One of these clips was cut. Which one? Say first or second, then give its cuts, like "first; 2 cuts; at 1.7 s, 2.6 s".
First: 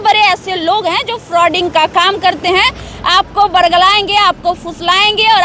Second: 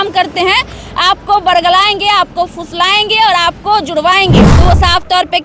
second; 1 cut; at 4.5 s